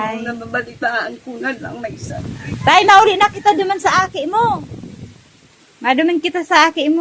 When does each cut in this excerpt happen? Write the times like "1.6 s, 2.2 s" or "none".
2.3 s